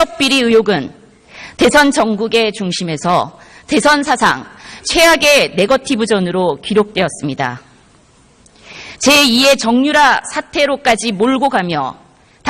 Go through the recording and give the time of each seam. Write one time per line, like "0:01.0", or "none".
0:09.3